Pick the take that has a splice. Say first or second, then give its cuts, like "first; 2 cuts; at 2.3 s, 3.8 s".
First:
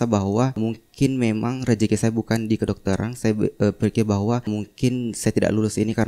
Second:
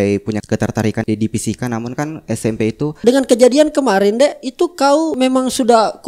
second; 3 cuts; at 0.9 s, 3.0 s, 5.1 s